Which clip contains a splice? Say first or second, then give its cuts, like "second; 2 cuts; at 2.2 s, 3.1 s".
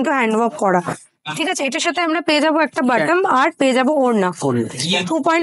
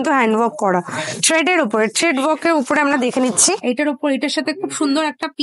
second; 2 cuts; at 1.2 s, 3.6 s